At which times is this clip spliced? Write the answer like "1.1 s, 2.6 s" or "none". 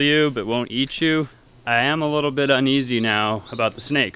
1.4 s